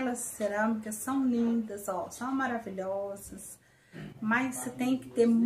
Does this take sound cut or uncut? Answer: uncut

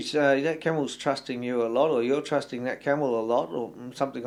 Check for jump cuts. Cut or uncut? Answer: uncut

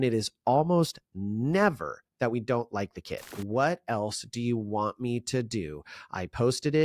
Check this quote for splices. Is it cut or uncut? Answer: cut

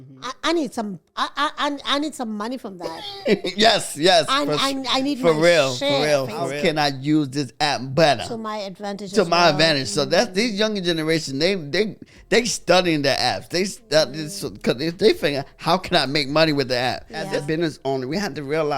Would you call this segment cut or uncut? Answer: cut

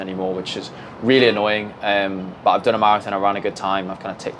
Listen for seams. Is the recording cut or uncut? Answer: uncut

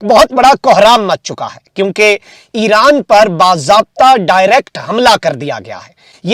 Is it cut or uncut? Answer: uncut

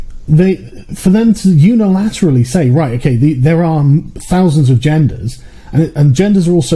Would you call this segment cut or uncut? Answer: uncut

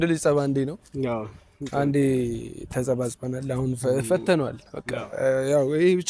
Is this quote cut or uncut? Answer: uncut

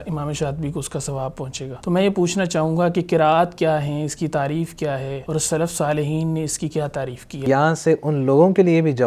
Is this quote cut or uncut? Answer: cut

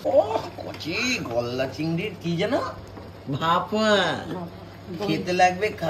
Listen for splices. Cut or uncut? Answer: uncut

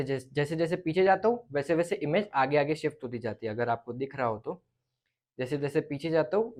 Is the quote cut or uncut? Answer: uncut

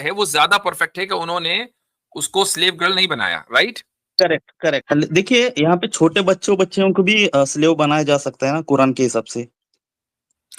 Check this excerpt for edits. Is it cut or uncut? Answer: cut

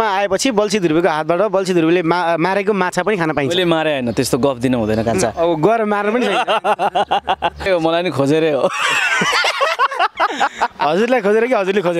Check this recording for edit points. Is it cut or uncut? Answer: cut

